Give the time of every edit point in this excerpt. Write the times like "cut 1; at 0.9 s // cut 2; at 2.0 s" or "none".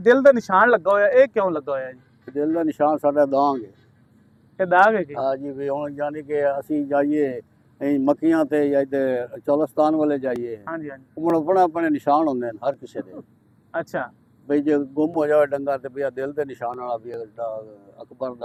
none